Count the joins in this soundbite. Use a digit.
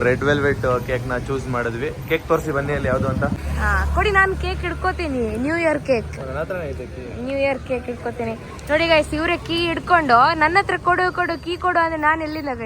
1